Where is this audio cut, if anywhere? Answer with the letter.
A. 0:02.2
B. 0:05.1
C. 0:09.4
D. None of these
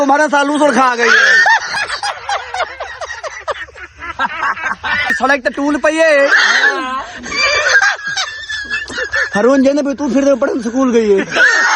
B